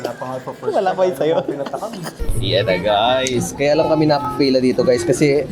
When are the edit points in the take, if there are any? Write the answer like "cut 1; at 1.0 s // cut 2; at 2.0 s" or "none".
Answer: cut 1; at 2.2 s // cut 2; at 4.3 s